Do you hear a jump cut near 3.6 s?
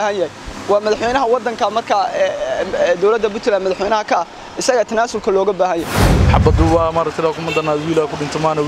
no; 1 cut; at 6.0 s

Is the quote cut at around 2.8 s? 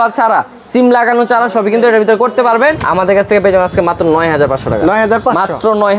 yes; 1 cut; at 2.8 s

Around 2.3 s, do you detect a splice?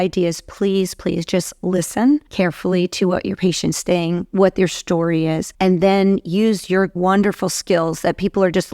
yes; 3 cuts; at 2.3 s, 5.5 s, 6.9 s

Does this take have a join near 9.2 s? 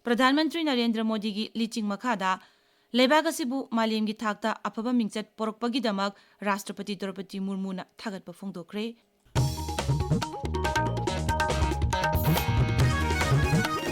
yes; 1 cut; at 9.2 s

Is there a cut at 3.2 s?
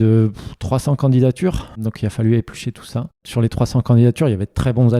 yes; 2 cuts; at 1.8 s, 3.2 s

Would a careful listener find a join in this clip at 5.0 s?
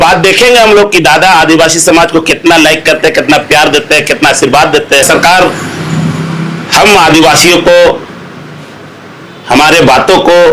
yes; 1 cut; at 5.0 s

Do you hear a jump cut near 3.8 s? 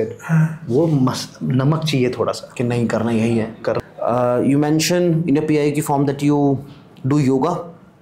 yes; 1 cut; at 3.8 s

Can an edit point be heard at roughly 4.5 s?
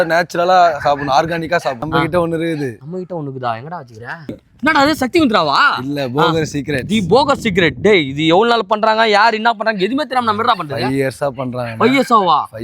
yes; 2 cuts; at 1.8 s, 4.5 s

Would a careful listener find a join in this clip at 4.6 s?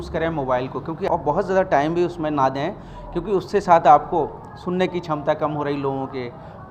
no; 1 cut; at 1.1 s

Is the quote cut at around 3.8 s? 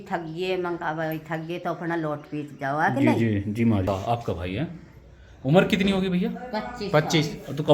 yes; 1 cut; at 3.8 s

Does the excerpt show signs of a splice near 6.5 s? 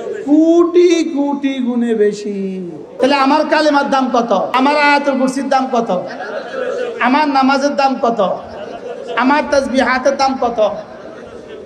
no; 2 cuts; at 3.0 s, 4.5 s

